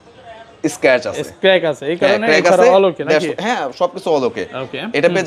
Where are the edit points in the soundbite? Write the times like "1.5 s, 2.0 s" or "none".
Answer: none